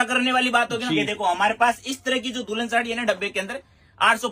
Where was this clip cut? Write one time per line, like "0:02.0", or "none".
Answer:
0:01.1